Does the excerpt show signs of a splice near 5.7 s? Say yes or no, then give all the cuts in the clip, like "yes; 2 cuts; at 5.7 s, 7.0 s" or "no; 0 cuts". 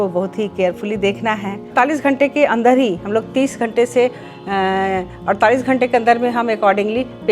no; 1 cut; at 1.7 s